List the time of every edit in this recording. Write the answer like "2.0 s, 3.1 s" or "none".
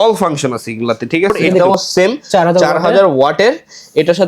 1.6 s